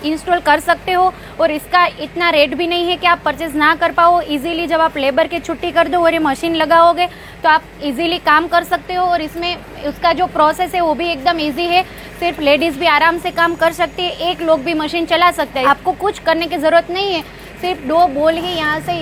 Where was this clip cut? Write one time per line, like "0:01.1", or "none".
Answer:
none